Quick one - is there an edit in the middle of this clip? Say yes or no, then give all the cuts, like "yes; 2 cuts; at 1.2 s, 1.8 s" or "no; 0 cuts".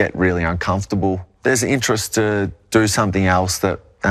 yes; 1 cut; at 1.3 s